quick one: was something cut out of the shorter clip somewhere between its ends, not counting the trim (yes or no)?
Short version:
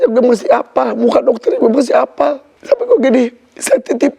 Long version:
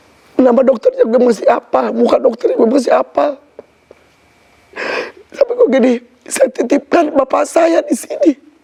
yes